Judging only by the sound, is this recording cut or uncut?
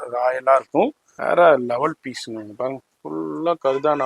cut